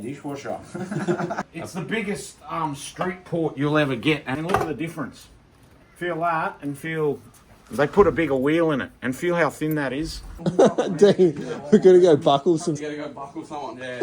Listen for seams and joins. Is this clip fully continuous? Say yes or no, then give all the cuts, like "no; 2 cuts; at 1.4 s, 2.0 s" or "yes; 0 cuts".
no; 3 cuts; at 1.5 s, 4.3 s, 10.3 s